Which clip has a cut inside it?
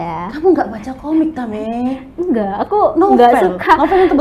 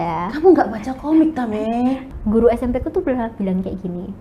second; 1 cut; at 2.1 s

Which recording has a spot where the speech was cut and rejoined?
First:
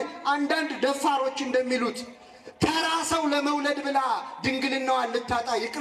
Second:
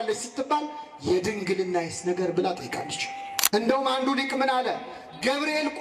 second; 1 cut; at 3.3 s

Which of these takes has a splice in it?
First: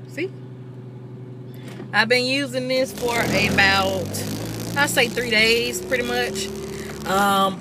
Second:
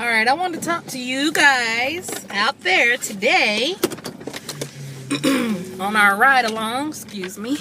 first; 1 cut; at 5.4 s

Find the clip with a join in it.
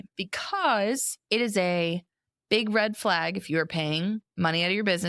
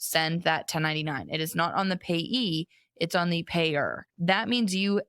second; 1 cut; at 4.1 s

